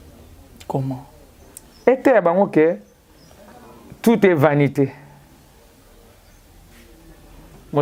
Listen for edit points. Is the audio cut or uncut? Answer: uncut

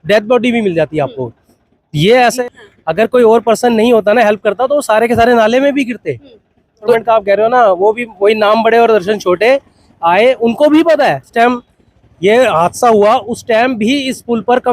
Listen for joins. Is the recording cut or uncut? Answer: cut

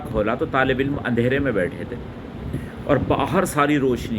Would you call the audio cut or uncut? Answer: uncut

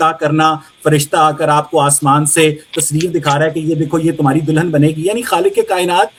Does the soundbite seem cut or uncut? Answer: uncut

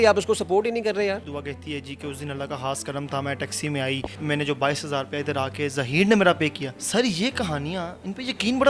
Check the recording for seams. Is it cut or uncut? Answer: cut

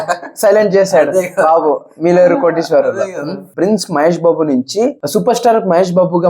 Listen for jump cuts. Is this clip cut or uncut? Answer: cut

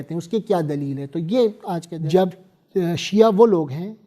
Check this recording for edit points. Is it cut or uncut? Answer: cut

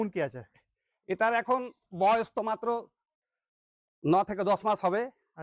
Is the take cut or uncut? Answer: uncut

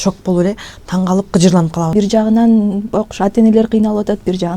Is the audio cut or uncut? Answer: cut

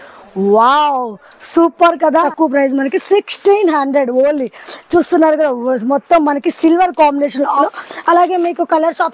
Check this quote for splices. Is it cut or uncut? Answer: cut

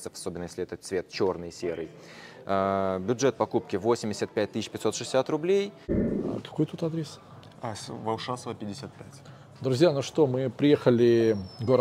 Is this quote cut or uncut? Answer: cut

